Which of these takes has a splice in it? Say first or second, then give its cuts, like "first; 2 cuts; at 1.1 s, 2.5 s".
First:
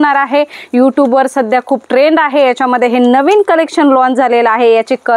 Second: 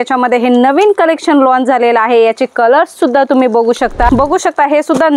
second; 1 cut; at 4.1 s